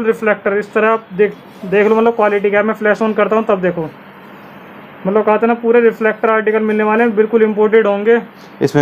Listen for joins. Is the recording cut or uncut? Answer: uncut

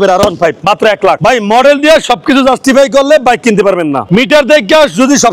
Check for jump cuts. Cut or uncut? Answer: cut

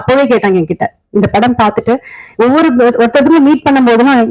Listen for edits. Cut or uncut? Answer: uncut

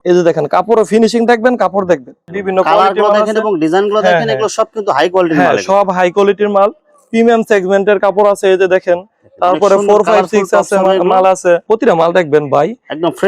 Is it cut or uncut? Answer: cut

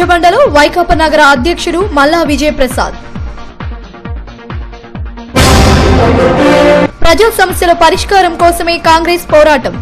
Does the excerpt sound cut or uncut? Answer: cut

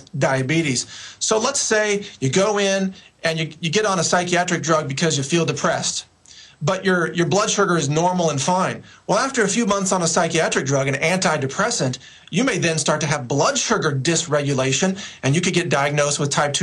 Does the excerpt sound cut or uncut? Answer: uncut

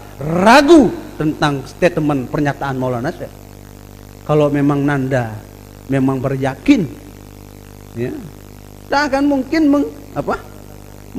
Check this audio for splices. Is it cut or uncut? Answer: uncut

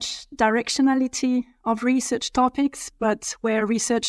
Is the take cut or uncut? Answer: uncut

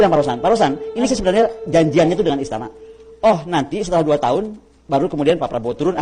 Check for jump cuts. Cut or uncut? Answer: cut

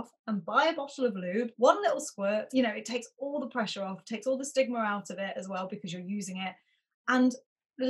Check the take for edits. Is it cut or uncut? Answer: cut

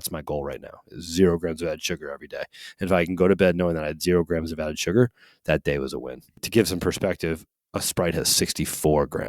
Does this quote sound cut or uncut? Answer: cut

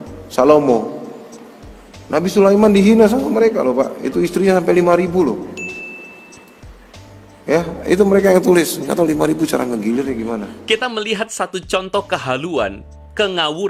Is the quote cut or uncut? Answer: uncut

